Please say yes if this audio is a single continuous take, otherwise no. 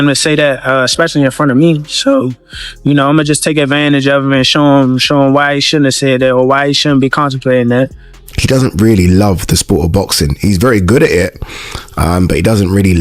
no